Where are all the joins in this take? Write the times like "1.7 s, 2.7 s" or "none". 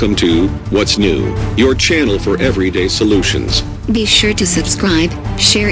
none